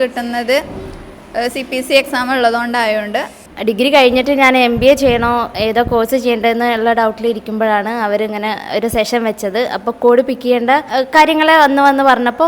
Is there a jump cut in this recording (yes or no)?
yes